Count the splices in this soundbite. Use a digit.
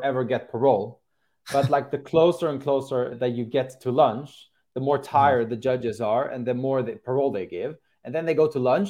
1